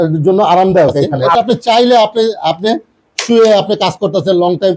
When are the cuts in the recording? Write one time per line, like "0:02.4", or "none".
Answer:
0:01.2

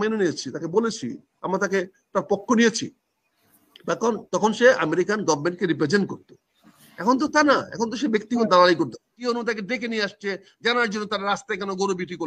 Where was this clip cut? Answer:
0:09.1

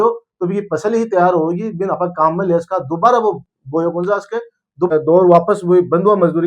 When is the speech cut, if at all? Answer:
0:04.9

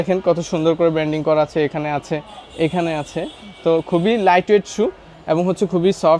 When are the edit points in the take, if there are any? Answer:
none

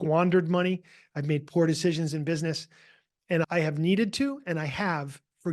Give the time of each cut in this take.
0:03.5

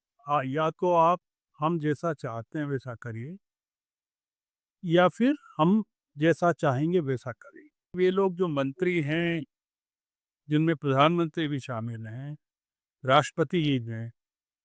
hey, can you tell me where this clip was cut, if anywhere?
0:07.9

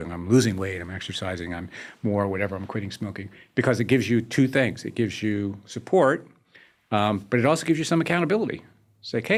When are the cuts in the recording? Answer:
none

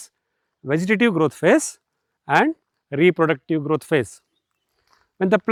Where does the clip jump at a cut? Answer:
none

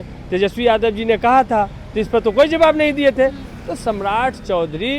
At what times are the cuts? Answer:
none

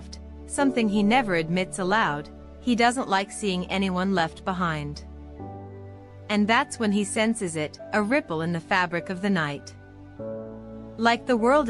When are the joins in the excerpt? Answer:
0:09.6
0:10.9

